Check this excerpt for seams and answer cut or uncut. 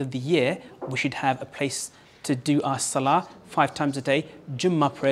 uncut